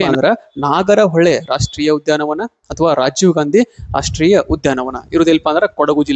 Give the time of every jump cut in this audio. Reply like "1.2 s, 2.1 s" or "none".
none